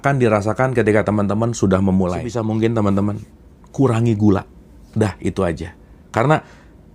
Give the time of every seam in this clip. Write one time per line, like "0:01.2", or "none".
0:02.4